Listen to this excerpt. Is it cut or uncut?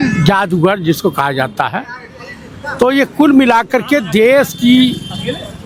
uncut